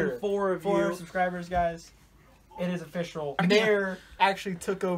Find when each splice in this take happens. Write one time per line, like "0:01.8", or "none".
0:03.4